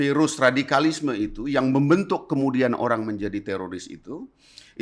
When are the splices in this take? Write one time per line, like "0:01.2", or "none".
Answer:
none